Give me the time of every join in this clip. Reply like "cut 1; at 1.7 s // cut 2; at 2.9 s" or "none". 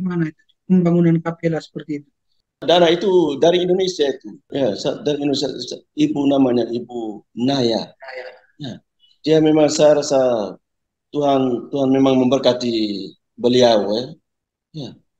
cut 1; at 2.6 s // cut 2; at 4.3 s